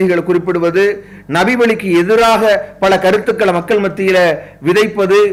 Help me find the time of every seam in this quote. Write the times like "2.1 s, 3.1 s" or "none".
none